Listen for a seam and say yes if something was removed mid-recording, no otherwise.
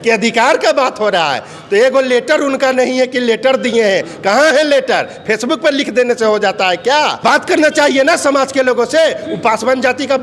no